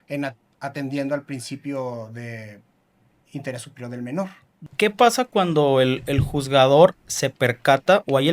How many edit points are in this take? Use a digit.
1